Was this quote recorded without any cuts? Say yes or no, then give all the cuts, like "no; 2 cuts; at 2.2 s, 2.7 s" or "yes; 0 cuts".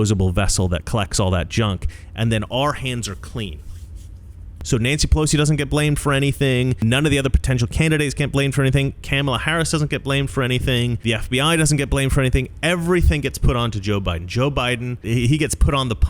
no; 4 cuts; at 4.5 s, 6.8 s, 11.0 s, 15.0 s